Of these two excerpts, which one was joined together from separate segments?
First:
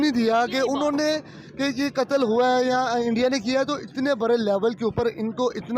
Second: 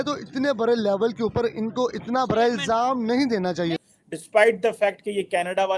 second; 1 cut; at 3.8 s

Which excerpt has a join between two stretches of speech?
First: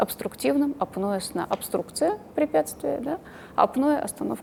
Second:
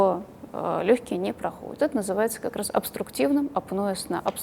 second; 1 cut; at 1.8 s

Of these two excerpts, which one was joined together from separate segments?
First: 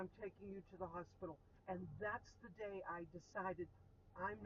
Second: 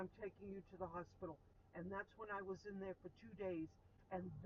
first; 1 cut; at 1.5 s

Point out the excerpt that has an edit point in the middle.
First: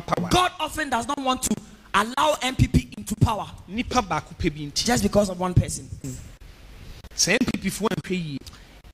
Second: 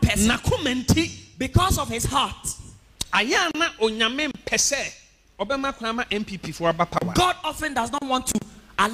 first; 1 cut; at 6.0 s

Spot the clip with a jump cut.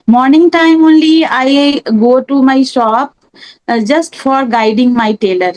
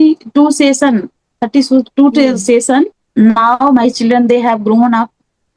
second; 1 cut; at 3.0 s

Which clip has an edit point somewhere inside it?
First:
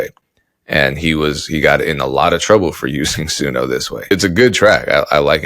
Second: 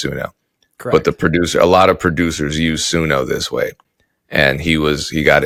first; 1 cut; at 4.1 s

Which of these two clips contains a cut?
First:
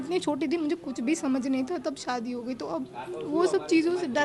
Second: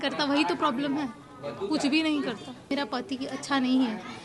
second; 1 cut; at 2.7 s

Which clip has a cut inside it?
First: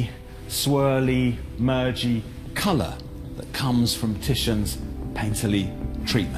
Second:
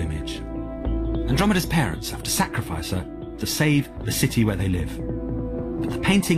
second; 1 cut; at 4.1 s

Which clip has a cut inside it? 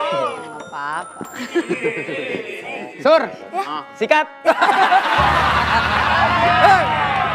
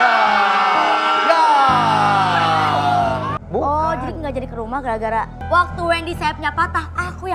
second; 2 cuts; at 3.3 s, 5.4 s

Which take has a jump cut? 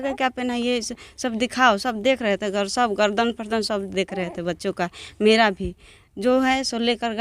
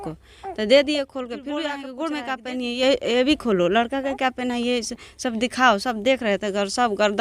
second; 1 cut; at 1.8 s

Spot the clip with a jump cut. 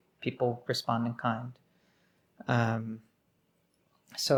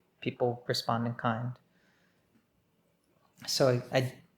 second; 1 cut; at 2.3 s

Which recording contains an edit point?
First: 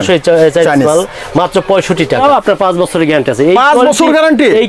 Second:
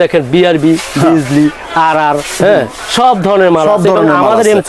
first; 1 cut; at 2.2 s

